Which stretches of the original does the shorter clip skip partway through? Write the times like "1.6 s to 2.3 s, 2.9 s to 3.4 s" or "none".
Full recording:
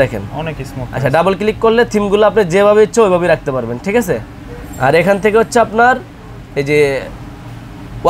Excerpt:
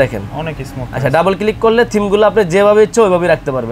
none